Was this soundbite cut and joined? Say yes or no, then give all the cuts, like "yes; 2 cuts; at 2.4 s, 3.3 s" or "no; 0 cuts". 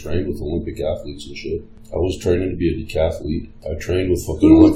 yes; 2 cuts; at 1.8 s, 3.5 s